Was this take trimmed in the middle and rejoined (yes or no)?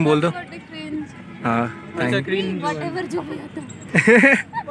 no